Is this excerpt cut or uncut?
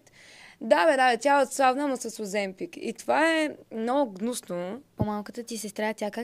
cut